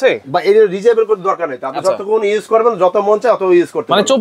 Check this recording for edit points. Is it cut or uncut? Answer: uncut